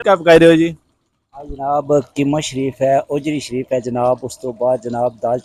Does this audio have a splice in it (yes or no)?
no